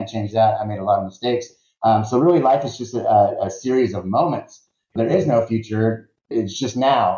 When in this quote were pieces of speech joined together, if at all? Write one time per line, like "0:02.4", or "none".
0:04.9
0:06.3